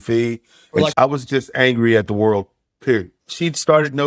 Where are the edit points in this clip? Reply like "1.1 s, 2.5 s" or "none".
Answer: 0.9 s, 3.1 s